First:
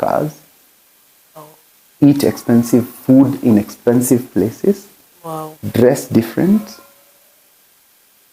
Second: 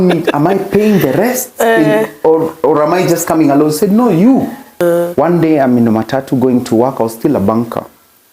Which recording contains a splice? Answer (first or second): second